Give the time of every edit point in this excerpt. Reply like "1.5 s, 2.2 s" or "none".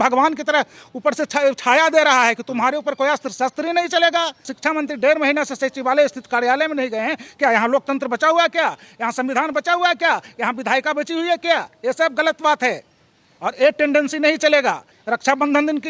4.5 s, 14.9 s